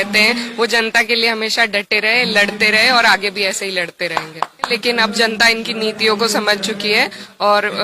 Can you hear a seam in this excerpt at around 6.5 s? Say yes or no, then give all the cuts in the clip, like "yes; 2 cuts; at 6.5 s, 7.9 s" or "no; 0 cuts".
no; 1 cut; at 4.7 s